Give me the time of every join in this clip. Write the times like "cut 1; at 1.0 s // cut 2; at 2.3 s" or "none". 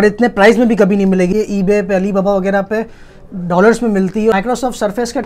cut 1; at 1.3 s // cut 2; at 4.3 s